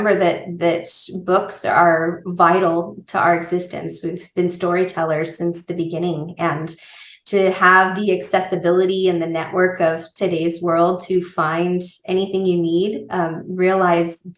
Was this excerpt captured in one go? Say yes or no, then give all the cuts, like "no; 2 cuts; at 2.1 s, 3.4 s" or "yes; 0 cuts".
yes; 0 cuts